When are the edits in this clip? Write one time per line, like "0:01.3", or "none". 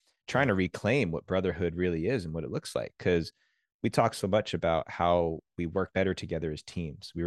0:05.9